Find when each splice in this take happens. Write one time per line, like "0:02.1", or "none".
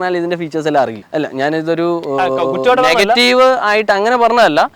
none